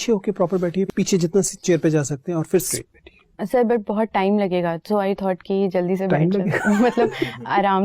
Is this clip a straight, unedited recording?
no; 2 cuts; at 0.9 s, 2.7 s

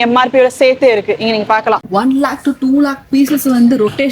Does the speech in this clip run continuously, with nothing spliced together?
no; 1 cut; at 1.8 s

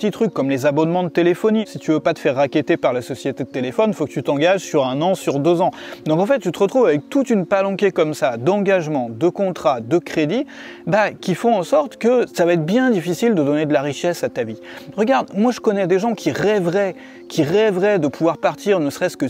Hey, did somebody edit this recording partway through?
yes; 3 cuts; at 1.7 s, 12.3 s, 14.8 s

